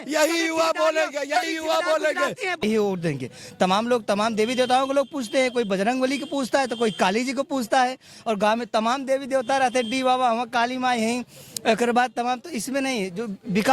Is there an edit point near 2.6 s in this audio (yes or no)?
yes